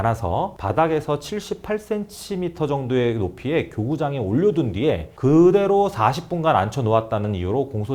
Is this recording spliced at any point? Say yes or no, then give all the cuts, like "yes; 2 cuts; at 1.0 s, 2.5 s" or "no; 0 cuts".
no; 0 cuts